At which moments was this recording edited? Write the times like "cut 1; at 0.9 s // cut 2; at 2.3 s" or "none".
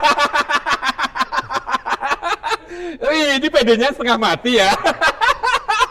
none